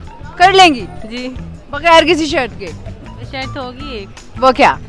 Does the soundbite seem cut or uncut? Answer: uncut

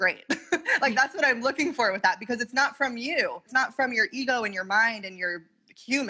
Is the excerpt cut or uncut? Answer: cut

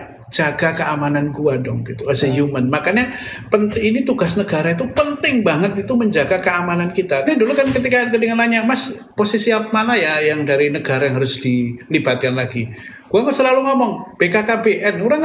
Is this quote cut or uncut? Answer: cut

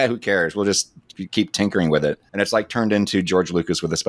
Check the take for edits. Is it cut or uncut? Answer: cut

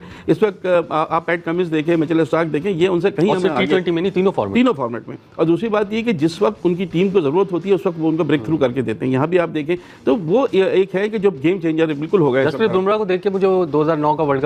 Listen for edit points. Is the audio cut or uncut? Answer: uncut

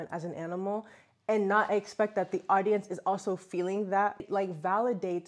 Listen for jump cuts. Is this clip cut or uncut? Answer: cut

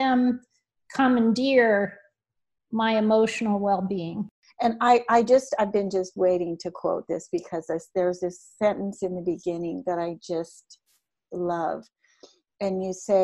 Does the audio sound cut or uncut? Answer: cut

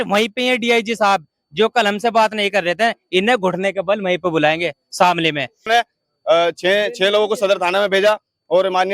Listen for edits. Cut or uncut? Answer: cut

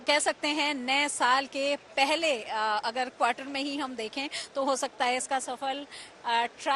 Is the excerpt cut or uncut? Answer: uncut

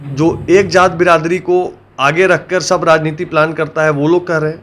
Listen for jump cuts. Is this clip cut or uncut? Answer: uncut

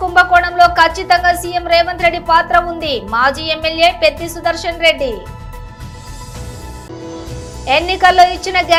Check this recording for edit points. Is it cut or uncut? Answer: uncut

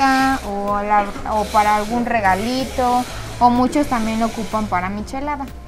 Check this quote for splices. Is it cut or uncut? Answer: uncut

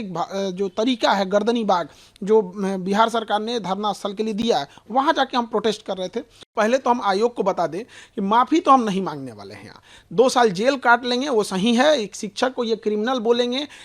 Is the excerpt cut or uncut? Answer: cut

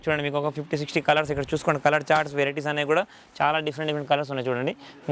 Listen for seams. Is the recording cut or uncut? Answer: uncut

